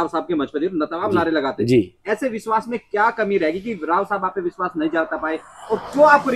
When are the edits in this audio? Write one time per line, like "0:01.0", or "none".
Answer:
none